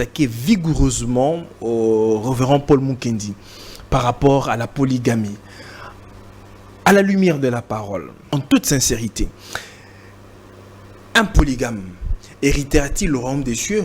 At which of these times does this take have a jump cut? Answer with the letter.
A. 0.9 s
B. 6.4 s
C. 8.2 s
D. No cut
C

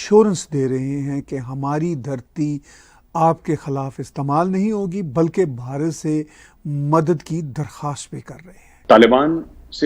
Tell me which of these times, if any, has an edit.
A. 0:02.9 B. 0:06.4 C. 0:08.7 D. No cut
C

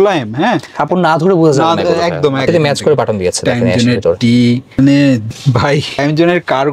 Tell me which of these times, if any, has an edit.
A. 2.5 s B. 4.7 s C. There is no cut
A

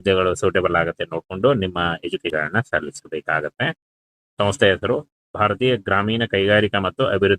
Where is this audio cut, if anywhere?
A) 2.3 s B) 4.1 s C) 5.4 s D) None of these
A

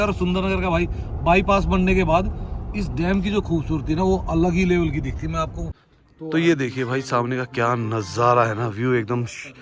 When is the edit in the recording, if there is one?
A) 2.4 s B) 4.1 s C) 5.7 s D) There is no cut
C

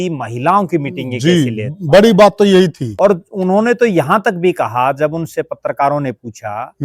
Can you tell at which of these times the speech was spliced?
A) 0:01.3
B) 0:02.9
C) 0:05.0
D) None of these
B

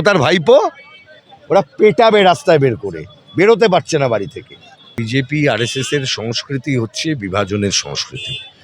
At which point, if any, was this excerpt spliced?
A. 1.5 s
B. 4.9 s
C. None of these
B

